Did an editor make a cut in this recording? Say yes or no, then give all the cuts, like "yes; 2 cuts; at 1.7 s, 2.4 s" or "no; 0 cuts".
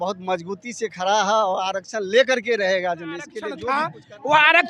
yes; 1 cut; at 3.5 s